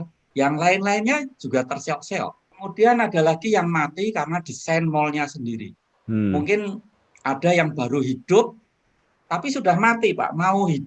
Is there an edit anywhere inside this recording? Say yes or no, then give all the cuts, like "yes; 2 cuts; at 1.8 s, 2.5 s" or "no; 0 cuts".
yes; 1 cut; at 2.5 s